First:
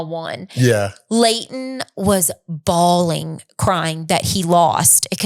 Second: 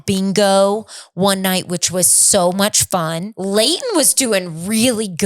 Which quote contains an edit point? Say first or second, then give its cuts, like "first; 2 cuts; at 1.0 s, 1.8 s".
second; 1 cut; at 3.3 s